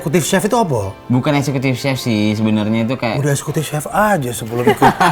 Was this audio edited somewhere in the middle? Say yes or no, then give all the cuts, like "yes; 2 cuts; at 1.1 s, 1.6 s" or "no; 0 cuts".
no; 0 cuts